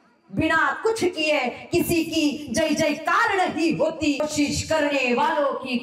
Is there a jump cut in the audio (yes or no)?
yes